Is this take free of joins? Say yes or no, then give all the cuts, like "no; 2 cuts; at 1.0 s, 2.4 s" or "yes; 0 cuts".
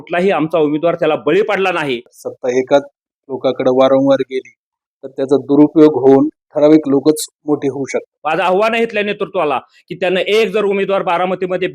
no; 2 cuts; at 2.1 s, 8.1 s